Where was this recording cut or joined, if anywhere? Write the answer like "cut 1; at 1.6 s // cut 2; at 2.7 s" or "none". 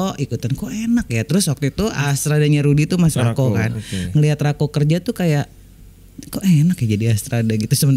cut 1; at 2.0 s